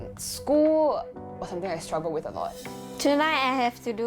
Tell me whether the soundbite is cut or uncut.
cut